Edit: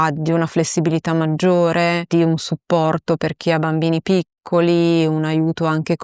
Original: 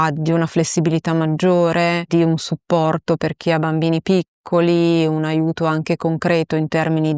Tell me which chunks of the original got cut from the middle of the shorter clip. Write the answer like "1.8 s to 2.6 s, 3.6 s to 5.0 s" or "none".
none

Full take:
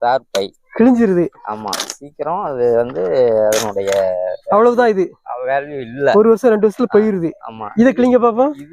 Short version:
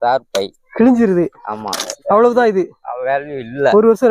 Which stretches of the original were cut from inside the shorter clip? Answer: 1.9 s to 4.3 s

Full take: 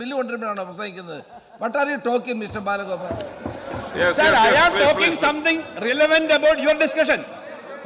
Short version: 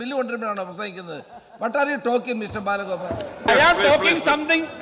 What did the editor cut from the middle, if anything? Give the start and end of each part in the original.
3.5 s to 4.4 s

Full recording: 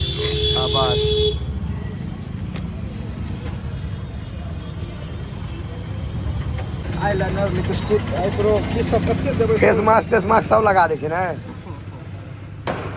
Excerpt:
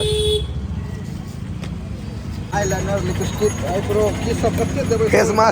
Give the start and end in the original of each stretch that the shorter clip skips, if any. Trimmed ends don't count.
3.4 s to 7.0 s

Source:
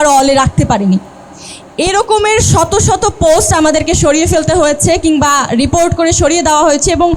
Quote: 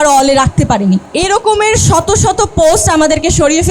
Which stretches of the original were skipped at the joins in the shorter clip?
1.1 s to 1.7 s

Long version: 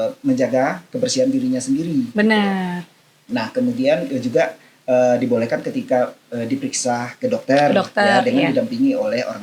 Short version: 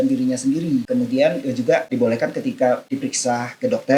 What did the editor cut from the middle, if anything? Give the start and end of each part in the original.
2.1 s to 3.5 s, 4.6 s to 5.2 s, 6.2 s to 6.5 s

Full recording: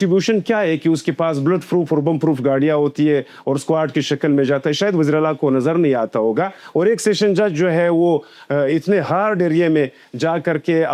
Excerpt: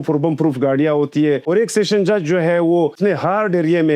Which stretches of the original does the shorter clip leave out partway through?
3.3 s to 6.7 s, 8.3 s to 8.8 s

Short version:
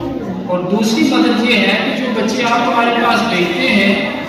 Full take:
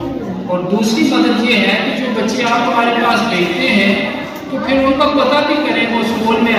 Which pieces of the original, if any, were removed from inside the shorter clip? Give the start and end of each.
none

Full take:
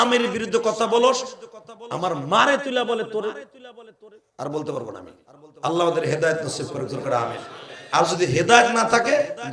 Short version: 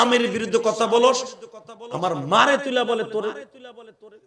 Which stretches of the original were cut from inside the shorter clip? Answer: none

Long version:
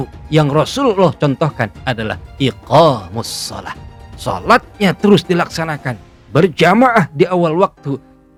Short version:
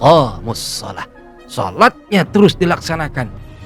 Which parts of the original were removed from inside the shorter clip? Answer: none

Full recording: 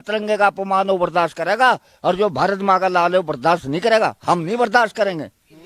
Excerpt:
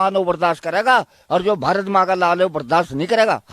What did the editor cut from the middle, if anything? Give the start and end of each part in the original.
none

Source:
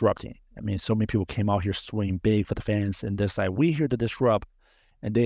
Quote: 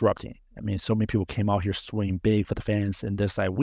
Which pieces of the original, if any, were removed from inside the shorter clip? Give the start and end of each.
none

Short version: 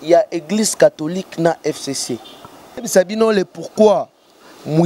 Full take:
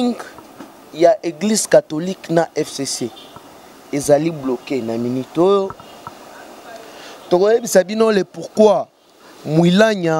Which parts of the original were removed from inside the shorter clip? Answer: 3.8 s to 7.7 s

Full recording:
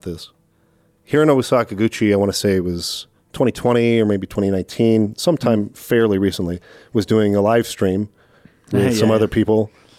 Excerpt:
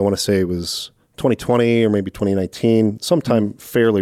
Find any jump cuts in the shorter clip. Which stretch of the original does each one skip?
none

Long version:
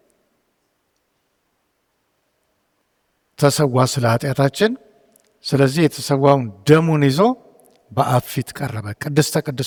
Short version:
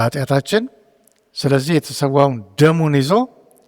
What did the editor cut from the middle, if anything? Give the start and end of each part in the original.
none

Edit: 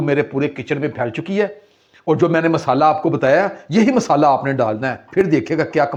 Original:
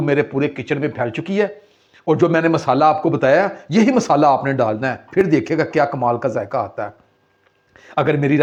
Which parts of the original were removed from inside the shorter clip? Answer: none

